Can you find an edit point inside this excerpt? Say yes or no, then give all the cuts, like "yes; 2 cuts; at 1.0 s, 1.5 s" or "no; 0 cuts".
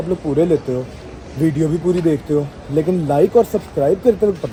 no; 0 cuts